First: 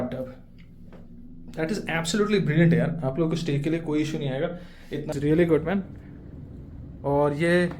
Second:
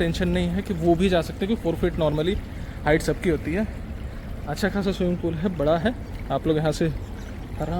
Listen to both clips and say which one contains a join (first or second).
first